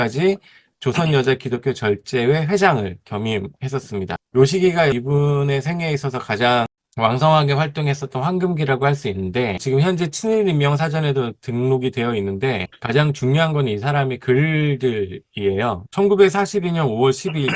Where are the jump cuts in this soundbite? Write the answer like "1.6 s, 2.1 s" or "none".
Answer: 4.2 s, 4.9 s, 6.8 s, 9.6 s, 15.9 s